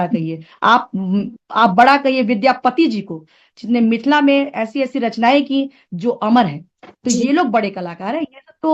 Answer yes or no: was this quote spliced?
no